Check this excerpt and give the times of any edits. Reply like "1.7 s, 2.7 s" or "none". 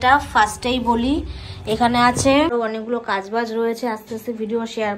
2.5 s